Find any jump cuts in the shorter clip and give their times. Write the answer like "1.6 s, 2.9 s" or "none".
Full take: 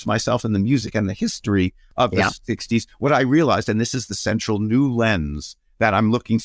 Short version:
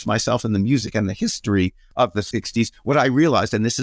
2.1 s